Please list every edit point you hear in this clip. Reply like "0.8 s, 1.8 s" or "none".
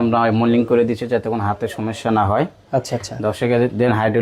none